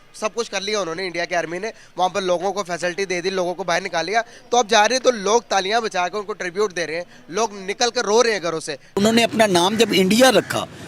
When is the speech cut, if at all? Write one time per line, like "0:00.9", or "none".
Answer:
0:09.0

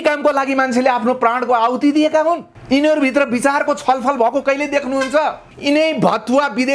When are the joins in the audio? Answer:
0:02.5
0:05.5

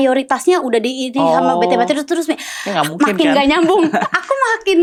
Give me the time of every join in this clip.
none

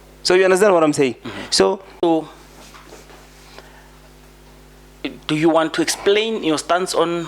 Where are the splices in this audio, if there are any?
0:02.0

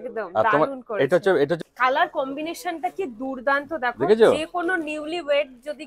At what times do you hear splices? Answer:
0:01.6

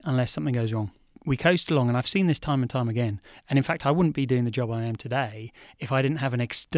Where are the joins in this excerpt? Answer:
0:01.2

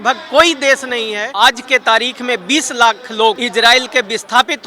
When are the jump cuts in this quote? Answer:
0:01.2
0:03.4

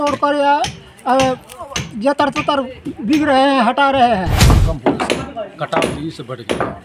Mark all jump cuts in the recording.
0:04.3

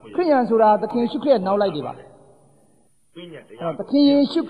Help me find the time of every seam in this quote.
none

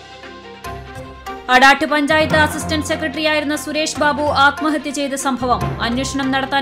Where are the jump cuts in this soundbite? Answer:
0:01.0

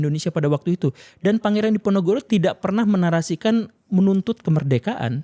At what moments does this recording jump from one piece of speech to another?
none

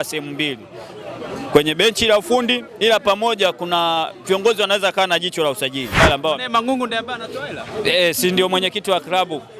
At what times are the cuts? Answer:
0:06.0

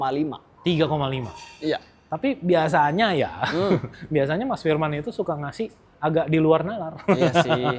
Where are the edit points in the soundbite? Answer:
none

